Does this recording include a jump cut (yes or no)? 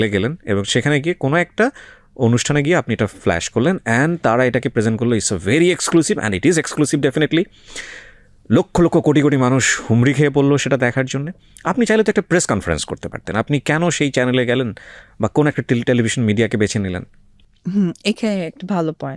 no